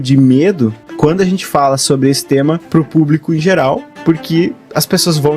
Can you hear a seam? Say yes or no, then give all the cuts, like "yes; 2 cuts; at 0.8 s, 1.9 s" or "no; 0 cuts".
yes; 3 cuts; at 0.8 s, 2.6 s, 3.9 s